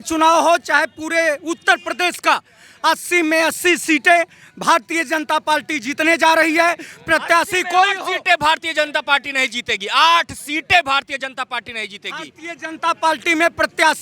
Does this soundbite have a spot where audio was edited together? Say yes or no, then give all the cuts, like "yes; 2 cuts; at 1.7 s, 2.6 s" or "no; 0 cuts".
no; 0 cuts